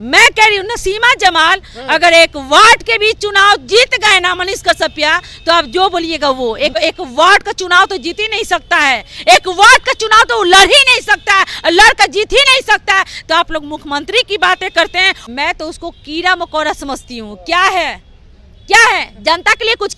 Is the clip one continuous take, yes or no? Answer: no